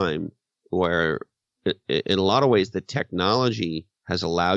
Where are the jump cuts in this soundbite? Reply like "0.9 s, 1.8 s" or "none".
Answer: none